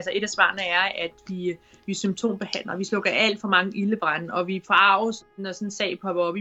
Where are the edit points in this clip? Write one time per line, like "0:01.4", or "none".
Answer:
0:05.3